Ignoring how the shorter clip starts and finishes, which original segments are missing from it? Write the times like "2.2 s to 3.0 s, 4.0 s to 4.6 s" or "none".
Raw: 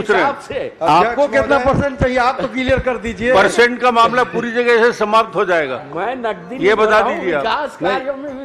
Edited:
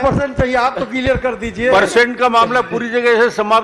none